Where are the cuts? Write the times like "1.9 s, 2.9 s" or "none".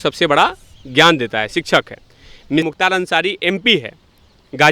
2.7 s